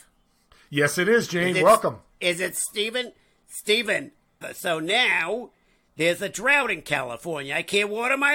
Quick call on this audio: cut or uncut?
cut